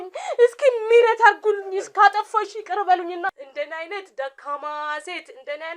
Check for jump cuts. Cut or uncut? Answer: cut